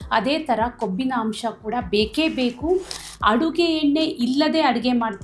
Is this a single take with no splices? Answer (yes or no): no